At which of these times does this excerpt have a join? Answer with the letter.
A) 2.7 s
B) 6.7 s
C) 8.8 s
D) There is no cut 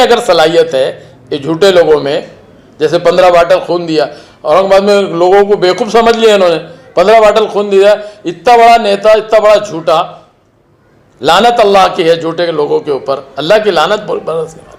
D